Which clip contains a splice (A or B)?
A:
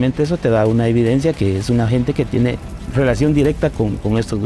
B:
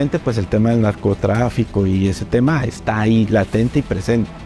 A